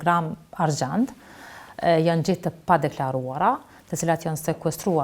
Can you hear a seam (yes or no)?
no